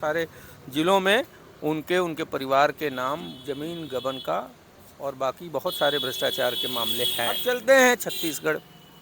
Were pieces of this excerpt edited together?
yes; 1 cut; at 7.4 s

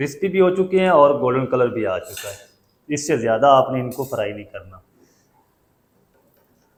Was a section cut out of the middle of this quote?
no; 0 cuts

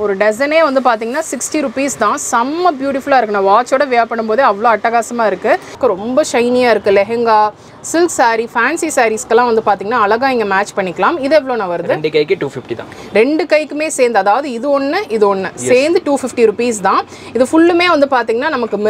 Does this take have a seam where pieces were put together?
yes; 1 cut; at 5.8 s

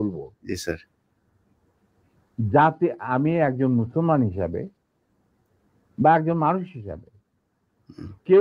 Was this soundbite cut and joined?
no; 0 cuts

